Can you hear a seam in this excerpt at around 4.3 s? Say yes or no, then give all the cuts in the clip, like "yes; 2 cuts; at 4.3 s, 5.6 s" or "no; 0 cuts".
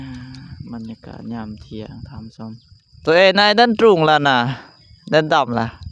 no; 1 cut; at 3.1 s